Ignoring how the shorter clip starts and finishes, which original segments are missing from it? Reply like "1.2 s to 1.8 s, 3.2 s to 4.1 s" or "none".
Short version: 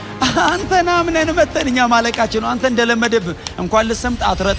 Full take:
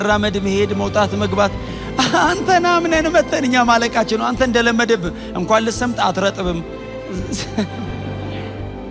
none